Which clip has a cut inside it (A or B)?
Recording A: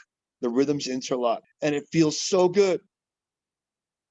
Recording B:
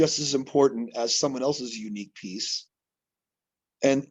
A